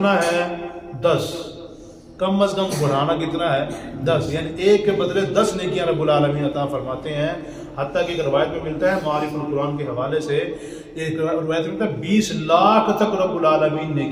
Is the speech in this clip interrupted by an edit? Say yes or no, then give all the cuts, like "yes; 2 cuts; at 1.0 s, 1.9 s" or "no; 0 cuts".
no; 0 cuts